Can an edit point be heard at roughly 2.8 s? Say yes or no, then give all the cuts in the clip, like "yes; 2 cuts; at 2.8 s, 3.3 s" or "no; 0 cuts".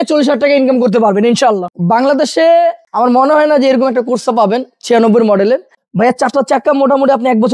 yes; 3 cuts; at 1.7 s, 2.8 s, 5.8 s